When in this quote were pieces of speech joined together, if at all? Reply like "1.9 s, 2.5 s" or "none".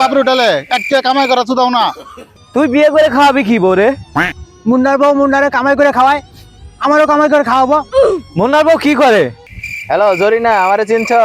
2.3 s, 9.4 s